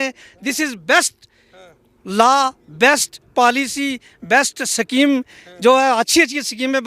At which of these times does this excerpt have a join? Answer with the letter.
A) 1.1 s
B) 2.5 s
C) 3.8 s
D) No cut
D